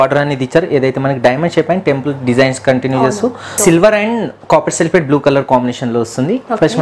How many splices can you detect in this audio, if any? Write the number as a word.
one